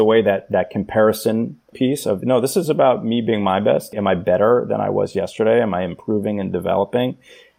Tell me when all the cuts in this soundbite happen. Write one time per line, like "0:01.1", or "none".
0:01.7
0:03.9